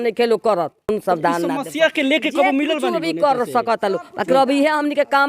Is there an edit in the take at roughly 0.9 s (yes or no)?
yes